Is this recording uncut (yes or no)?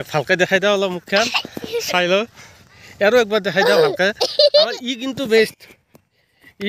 yes